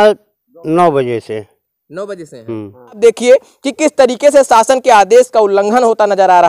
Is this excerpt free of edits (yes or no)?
no